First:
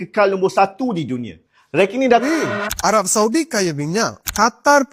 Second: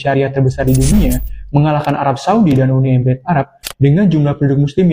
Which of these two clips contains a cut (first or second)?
first